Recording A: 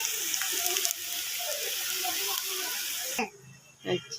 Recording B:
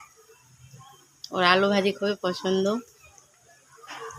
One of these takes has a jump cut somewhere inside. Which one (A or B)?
A